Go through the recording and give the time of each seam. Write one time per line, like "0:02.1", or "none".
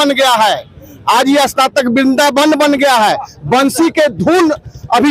none

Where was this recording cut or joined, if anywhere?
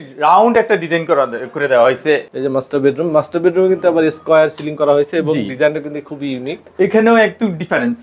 0:02.2

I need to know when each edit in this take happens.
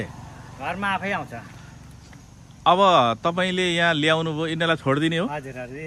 none

